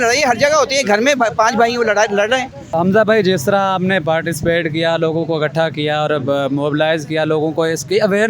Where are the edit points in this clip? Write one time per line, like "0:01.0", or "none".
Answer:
0:02.8

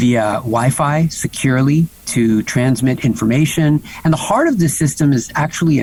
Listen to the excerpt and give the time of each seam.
none

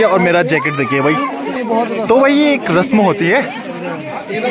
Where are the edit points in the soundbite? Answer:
0:01.6

